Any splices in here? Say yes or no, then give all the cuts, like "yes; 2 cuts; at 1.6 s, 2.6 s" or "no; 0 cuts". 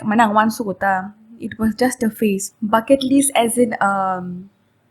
yes; 1 cut; at 2.5 s